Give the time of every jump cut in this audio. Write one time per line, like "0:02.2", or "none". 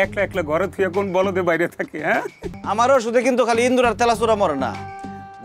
0:02.5